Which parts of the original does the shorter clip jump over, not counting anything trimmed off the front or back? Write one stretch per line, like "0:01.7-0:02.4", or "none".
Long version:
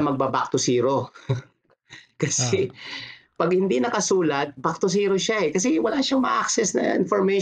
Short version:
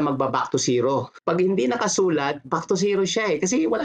0:01.1-0:03.3